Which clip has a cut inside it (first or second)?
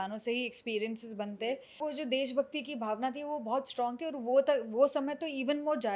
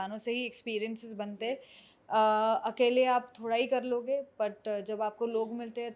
first